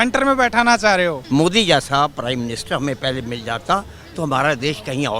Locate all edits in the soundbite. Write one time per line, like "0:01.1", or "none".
0:01.2